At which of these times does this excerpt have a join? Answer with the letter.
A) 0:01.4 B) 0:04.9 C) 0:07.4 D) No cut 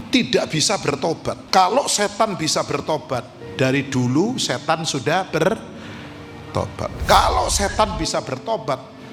A